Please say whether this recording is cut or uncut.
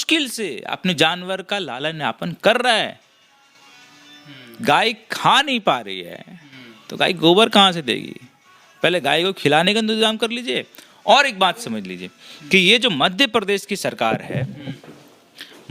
uncut